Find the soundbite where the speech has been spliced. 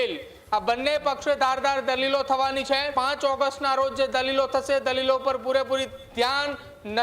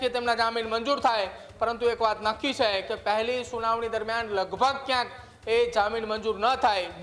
first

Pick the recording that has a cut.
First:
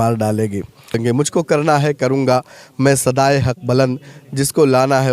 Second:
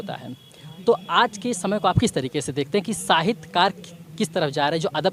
first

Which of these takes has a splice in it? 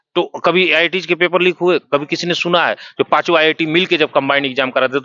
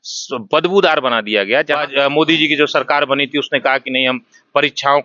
second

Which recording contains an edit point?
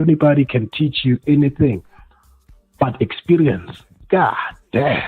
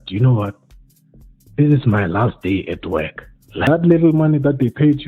second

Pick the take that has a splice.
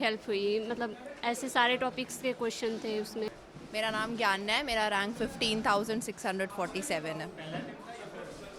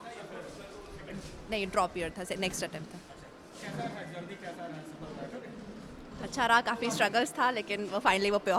first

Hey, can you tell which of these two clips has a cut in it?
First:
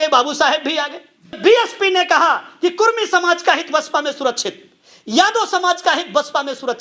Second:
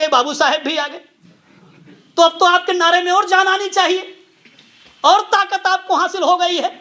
first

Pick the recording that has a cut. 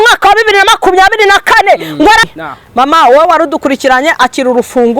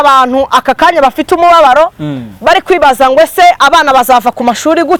first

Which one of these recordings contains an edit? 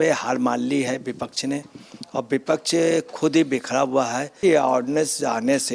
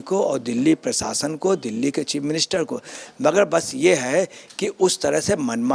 first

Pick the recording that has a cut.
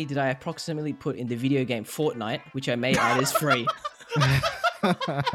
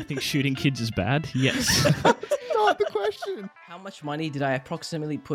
second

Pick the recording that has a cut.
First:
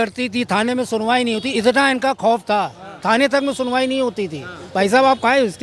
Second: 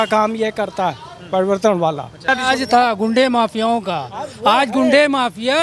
second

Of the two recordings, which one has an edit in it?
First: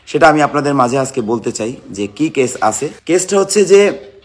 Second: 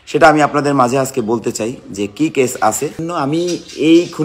second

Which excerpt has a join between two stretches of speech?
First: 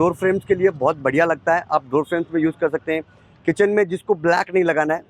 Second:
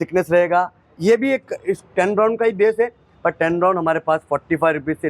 second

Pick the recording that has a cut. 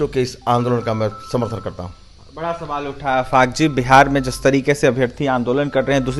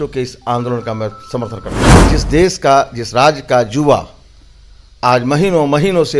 second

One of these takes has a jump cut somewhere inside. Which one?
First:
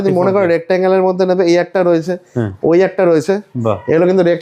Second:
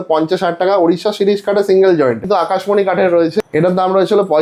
second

